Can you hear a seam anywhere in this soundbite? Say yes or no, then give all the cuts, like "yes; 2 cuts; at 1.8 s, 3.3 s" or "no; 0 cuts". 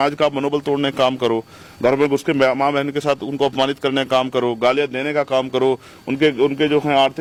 no; 0 cuts